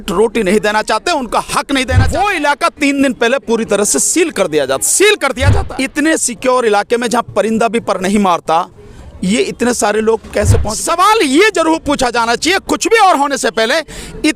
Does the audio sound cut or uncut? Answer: cut